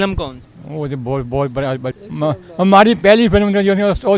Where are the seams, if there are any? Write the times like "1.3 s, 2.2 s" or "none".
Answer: 1.9 s